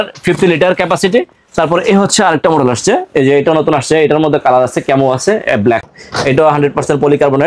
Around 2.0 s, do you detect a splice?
no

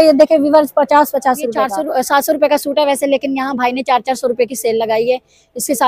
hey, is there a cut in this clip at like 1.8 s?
yes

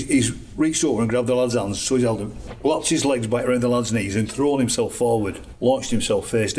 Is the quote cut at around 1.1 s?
no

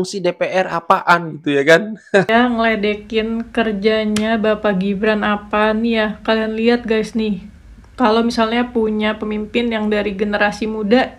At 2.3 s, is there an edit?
yes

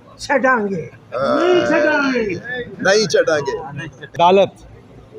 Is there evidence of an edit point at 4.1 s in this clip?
yes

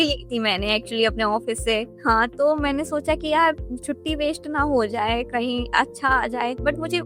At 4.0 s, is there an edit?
no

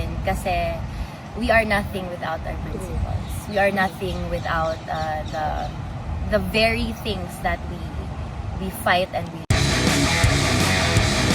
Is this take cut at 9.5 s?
yes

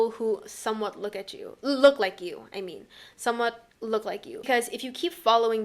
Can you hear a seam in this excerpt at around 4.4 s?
yes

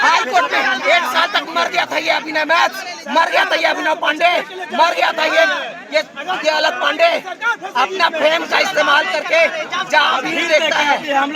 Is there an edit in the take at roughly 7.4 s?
no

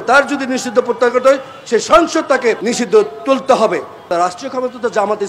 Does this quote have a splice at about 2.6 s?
yes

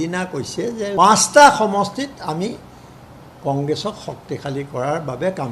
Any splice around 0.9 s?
yes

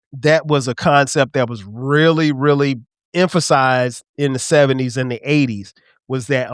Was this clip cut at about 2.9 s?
yes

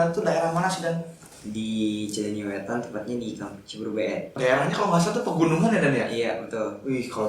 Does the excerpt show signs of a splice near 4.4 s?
yes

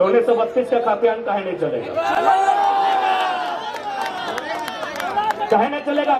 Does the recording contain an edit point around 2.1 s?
no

